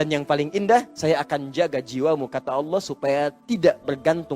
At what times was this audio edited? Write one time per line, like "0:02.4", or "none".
0:00.9